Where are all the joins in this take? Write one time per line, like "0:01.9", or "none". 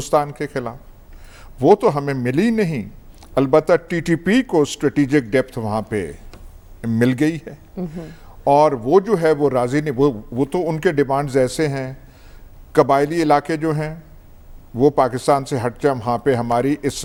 none